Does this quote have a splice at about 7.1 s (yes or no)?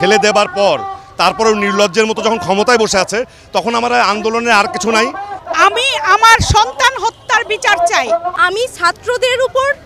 no